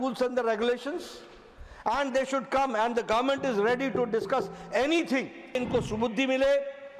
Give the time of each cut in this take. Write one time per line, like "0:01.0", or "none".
0:05.6

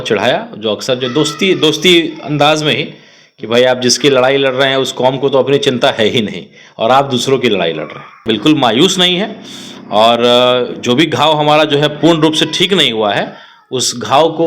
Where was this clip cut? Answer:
0:08.2

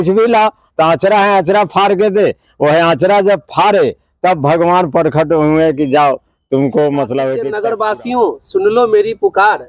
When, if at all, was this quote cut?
0:07.5

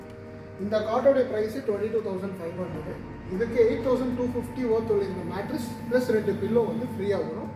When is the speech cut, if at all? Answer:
none

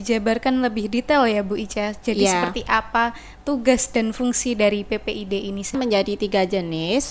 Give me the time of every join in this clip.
0:05.7

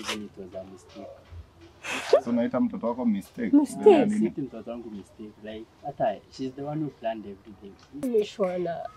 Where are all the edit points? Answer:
0:08.0

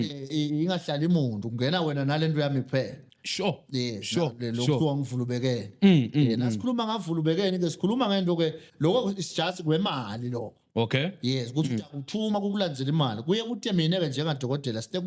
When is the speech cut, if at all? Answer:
none

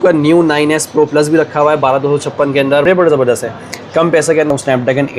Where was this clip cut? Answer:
0:02.8
0:04.5

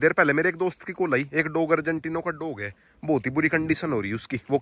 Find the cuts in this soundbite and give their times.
none

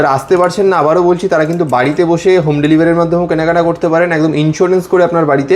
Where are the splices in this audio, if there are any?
none

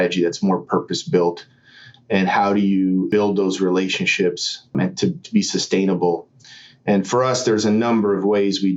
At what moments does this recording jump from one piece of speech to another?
0:03.1
0:04.7

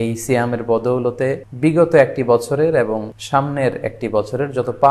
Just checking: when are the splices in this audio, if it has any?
0:01.5
0:03.1

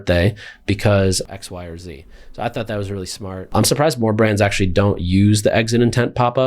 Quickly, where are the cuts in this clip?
0:01.2
0:03.5

